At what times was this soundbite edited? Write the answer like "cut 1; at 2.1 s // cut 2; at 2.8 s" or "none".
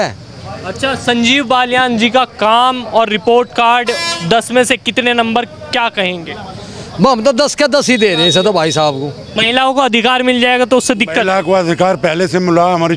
cut 1; at 9.2 s